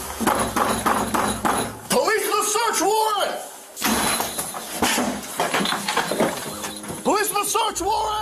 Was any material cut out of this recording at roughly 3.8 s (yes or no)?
yes